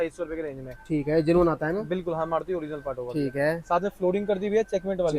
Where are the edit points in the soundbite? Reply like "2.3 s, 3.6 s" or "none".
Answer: none